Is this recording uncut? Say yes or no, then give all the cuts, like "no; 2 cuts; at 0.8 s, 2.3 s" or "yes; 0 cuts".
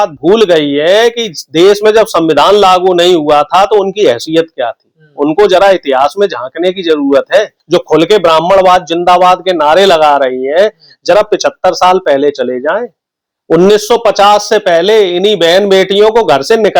no; 1 cut; at 7.6 s